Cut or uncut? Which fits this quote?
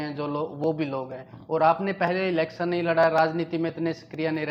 uncut